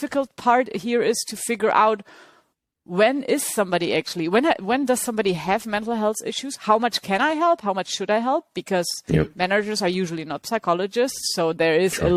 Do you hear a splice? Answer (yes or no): no